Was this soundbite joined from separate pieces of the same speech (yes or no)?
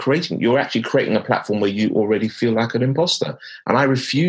no